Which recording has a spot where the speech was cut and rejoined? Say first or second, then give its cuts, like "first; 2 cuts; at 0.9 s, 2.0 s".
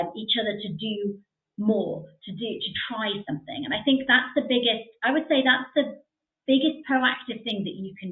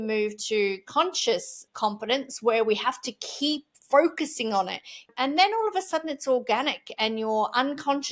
second; 2 cuts; at 1.6 s, 5.1 s